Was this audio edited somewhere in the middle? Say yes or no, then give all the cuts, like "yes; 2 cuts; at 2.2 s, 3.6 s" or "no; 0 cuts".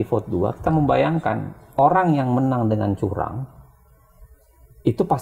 no; 0 cuts